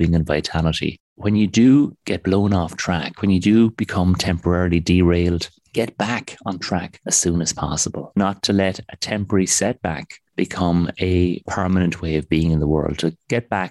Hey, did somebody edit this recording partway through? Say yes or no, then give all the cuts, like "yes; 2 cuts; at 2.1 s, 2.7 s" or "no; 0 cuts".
yes; 3 cuts; at 1.0 s, 8.2 s, 11.5 s